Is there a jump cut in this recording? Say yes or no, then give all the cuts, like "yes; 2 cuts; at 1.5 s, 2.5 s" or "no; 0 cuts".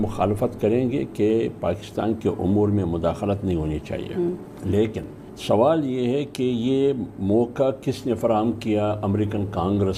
no; 0 cuts